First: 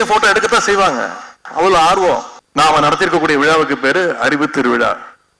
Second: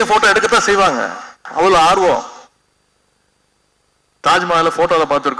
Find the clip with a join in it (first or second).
first